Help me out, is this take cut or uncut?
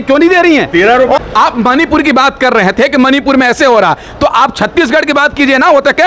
uncut